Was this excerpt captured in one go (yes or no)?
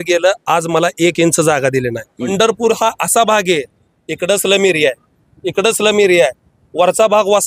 no